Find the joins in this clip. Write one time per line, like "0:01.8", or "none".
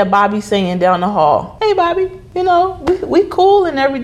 0:01.8